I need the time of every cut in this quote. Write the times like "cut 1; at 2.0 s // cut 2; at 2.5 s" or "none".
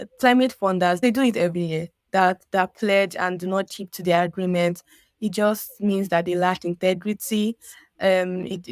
cut 1; at 1.0 s